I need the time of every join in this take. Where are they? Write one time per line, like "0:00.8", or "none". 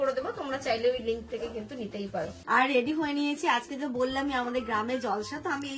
0:02.4